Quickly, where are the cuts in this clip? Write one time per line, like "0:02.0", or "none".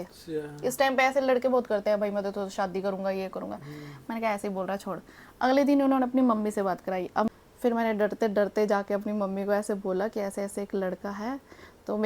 0:07.3